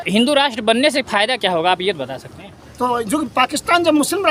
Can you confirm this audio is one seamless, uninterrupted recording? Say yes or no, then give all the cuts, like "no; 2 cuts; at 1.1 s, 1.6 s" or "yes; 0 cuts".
no; 1 cut; at 2.6 s